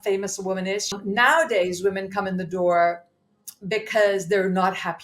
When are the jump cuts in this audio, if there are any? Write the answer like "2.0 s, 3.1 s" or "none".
1.0 s